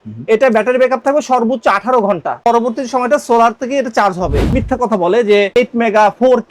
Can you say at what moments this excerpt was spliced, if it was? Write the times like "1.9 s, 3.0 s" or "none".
2.4 s, 4.4 s, 5.5 s